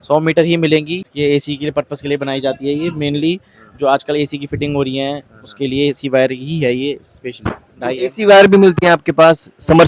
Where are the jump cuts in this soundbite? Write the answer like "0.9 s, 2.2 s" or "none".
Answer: 1.0 s